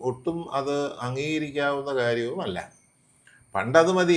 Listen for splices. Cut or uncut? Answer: uncut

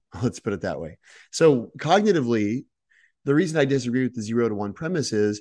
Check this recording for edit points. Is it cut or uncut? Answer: uncut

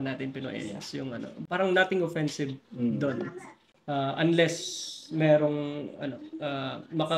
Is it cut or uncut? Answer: uncut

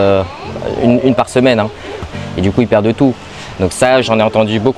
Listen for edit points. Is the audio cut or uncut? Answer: cut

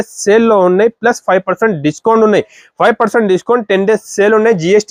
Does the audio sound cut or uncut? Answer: uncut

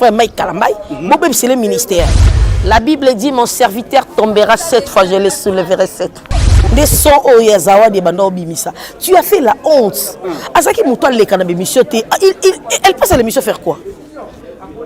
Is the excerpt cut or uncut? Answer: cut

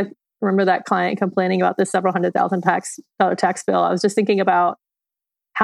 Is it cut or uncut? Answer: uncut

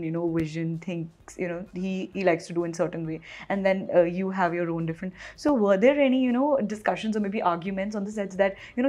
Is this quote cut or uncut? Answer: uncut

